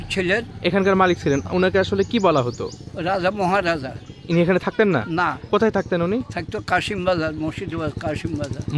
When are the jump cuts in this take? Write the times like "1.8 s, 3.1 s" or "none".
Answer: none